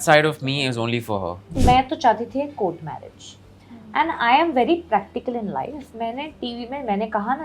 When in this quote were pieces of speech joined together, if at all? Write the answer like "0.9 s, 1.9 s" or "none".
1.5 s